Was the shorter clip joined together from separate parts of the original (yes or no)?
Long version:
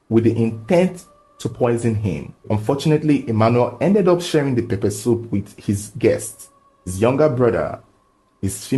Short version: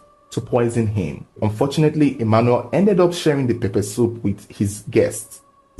no